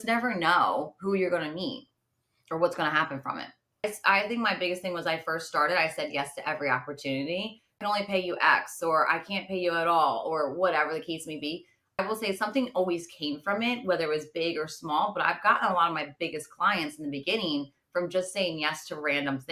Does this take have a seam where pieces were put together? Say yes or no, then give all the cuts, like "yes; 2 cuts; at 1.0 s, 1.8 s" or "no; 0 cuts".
yes; 3 cuts; at 3.8 s, 7.8 s, 12.0 s